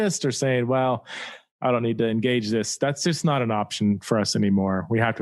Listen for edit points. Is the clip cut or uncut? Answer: uncut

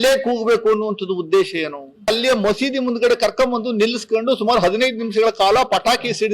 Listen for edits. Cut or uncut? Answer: cut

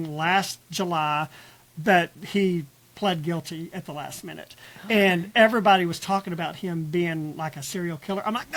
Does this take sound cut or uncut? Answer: uncut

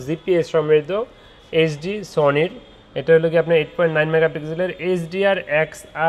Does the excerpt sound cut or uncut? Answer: uncut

